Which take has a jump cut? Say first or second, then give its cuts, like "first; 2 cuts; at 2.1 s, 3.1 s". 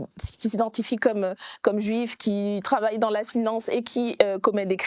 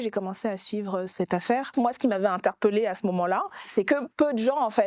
second; 2 cuts; at 1.7 s, 3.6 s